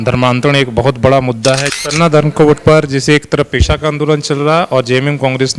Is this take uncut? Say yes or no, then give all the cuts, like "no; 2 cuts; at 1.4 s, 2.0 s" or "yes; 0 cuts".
no; 1 cut; at 1.7 s